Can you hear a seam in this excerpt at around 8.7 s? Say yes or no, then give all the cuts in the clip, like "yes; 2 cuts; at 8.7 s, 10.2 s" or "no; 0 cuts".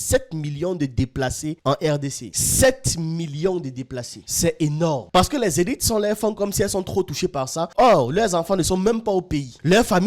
no; 1 cut; at 5.0 s